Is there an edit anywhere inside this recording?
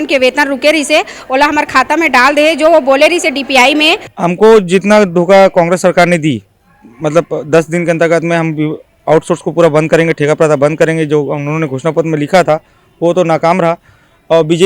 yes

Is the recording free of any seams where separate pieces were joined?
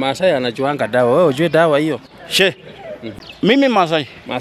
no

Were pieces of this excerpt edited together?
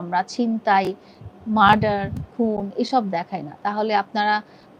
no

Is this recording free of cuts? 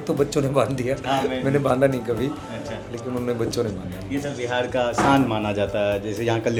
yes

